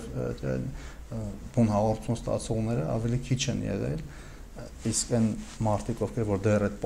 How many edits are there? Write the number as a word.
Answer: zero